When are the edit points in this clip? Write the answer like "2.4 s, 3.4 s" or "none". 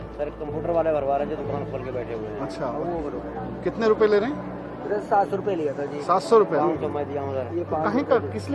none